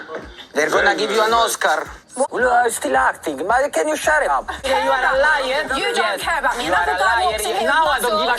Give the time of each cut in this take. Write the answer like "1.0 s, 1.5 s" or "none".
2.2 s, 4.8 s